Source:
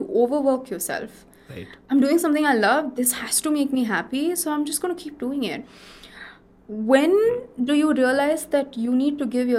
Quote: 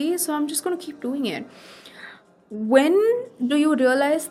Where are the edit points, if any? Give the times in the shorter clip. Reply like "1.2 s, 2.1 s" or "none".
none